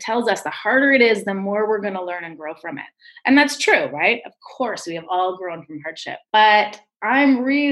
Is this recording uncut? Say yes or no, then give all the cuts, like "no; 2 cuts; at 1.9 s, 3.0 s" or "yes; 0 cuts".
no; 1 cut; at 6.2 s